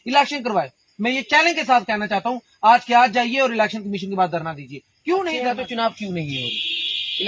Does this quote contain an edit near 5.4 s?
yes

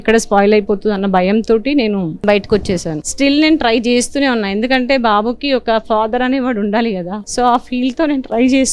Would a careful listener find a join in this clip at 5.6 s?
no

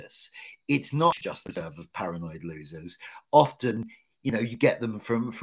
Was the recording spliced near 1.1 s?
yes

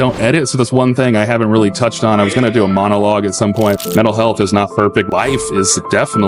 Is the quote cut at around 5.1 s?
yes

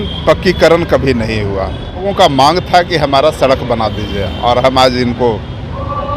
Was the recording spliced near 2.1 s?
yes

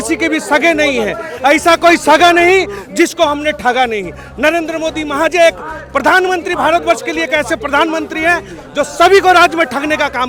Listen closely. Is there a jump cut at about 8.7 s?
no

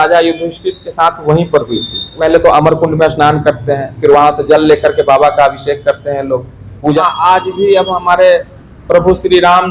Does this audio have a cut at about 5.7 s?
no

